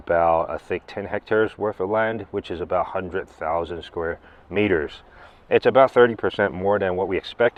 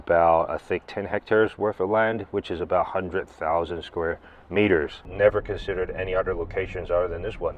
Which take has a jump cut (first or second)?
second